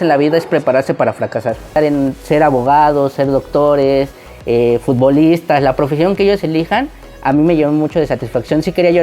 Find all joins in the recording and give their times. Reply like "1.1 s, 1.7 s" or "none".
1.8 s